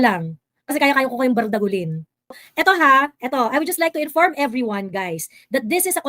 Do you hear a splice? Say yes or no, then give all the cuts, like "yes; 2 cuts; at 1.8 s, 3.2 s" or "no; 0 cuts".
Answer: yes; 1 cut; at 2.4 s